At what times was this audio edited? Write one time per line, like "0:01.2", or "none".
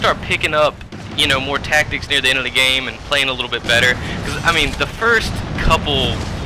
0:03.2